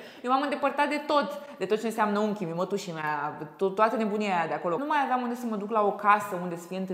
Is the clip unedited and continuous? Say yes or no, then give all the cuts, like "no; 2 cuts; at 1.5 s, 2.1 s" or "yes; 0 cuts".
no; 1 cut; at 4.8 s